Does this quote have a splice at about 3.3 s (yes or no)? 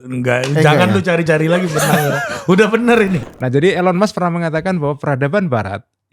yes